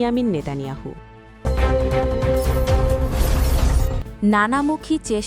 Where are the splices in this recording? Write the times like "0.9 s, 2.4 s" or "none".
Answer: 1.4 s, 4.2 s